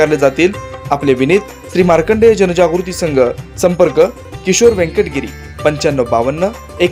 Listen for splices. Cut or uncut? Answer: uncut